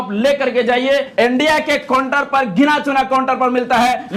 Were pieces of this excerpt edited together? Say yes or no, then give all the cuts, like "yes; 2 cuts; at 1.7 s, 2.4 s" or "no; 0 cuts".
yes; 1 cut; at 1.1 s